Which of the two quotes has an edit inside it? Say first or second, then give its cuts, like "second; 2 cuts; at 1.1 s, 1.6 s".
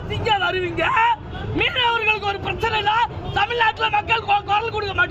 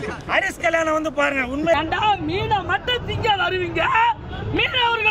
second; 1 cut; at 1.8 s